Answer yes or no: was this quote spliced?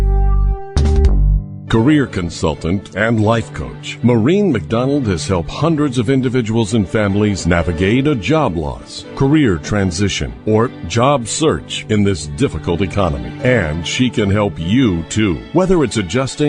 yes